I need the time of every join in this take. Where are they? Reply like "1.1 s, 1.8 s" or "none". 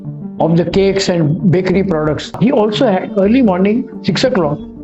2.3 s